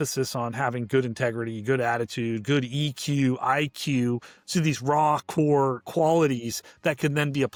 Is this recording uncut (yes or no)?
yes